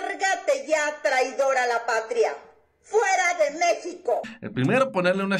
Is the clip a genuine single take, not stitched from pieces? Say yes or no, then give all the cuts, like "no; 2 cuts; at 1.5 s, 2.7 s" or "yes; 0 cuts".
no; 1 cut; at 4.4 s